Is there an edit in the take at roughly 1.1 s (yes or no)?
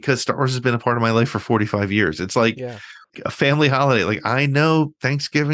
no